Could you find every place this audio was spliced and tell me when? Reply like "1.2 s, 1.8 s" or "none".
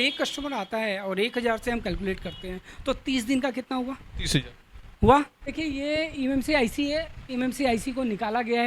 5.5 s